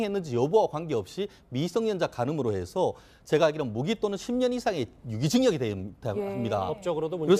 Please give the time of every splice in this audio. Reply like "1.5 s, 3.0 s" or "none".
none